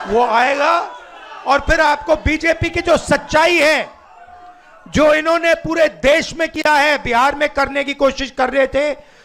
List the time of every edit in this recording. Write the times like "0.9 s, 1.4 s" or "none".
none